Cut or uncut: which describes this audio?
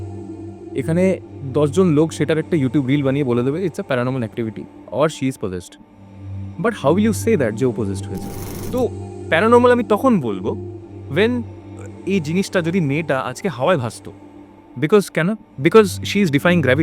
cut